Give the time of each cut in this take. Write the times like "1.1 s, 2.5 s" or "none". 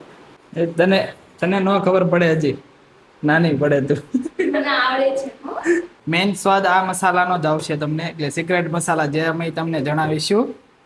6.0 s